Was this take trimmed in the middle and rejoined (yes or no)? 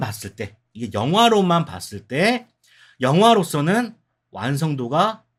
no